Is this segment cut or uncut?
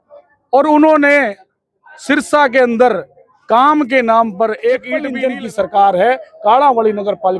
cut